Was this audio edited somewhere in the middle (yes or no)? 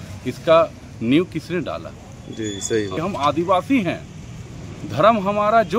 yes